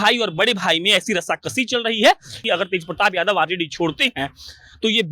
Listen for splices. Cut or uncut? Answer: cut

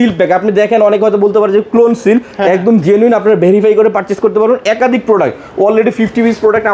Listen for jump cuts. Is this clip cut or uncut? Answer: uncut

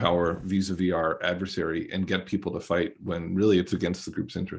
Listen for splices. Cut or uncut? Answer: uncut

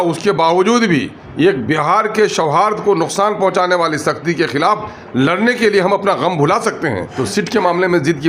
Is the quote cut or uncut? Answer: cut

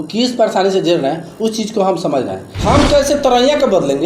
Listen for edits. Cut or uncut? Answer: cut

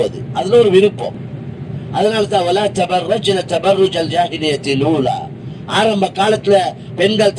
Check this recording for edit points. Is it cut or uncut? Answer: uncut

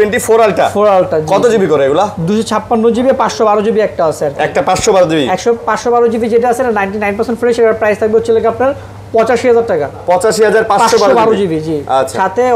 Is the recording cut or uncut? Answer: uncut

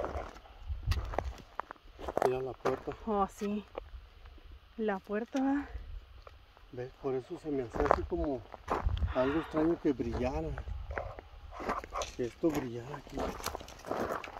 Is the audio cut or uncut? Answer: uncut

